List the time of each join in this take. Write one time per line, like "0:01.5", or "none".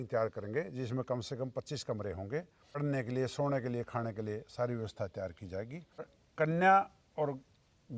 0:02.8
0:06.2